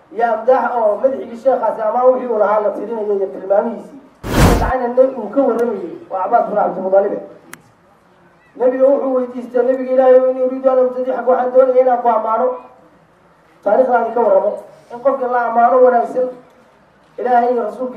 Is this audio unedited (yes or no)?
no